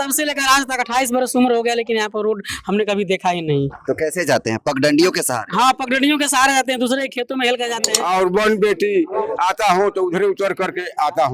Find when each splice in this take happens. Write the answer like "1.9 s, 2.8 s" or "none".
7.9 s